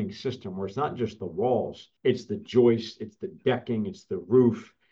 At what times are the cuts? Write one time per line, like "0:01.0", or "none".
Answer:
0:01.8